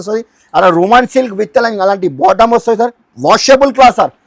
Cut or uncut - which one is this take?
cut